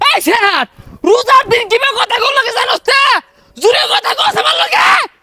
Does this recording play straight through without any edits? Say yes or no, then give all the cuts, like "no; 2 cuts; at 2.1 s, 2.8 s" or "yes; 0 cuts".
yes; 0 cuts